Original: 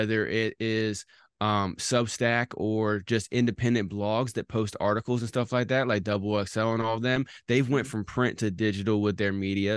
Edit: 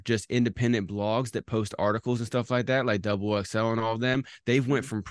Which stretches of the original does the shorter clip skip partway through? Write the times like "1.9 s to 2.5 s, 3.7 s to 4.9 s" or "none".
none